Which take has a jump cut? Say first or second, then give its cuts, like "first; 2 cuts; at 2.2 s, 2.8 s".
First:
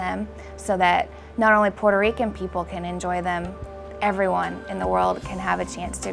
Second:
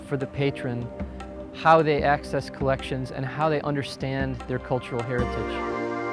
second; 1 cut; at 5.2 s